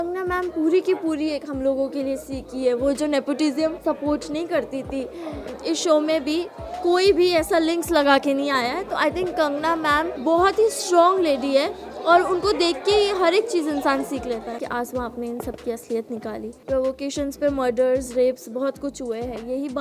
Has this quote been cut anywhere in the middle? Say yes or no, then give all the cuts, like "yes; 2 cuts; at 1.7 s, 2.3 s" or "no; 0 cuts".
yes; 5 cuts; at 3.8 s, 5.5 s, 10.1 s, 14.6 s, 16.6 s